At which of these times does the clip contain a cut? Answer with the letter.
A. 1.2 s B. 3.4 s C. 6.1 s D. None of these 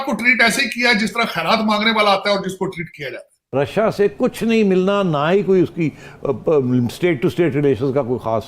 B